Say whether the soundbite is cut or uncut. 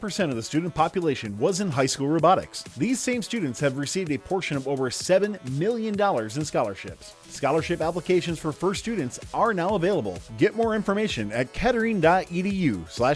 uncut